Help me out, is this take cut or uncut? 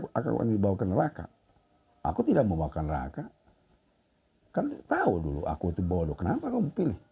uncut